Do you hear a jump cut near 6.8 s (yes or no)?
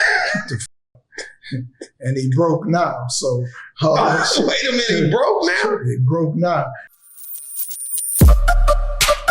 yes